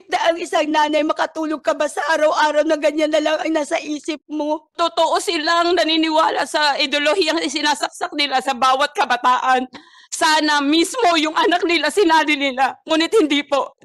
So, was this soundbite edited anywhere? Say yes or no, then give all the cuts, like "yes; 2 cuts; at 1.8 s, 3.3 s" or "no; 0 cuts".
yes; 1 cut; at 4.8 s